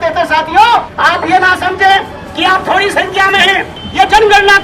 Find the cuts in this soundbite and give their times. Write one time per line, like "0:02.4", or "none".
0:00.9
0:03.8